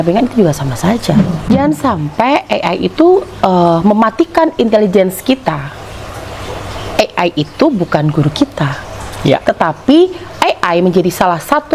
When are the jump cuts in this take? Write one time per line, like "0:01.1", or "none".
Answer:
0:01.3